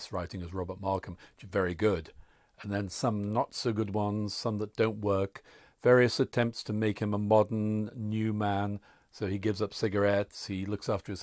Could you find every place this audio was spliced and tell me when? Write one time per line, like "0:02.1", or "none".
none